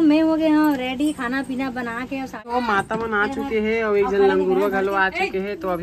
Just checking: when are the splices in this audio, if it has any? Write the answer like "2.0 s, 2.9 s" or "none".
2.4 s